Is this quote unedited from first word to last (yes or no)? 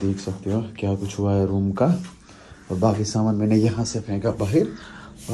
yes